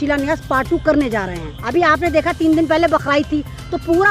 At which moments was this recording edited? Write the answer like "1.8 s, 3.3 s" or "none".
1.5 s